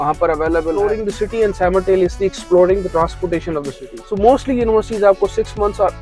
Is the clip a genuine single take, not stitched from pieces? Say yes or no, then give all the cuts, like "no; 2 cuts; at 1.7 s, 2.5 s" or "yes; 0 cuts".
no; 2 cuts; at 1.0 s, 3.8 s